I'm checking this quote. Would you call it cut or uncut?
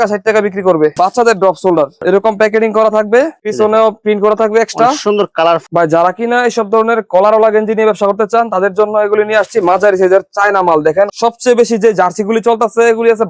cut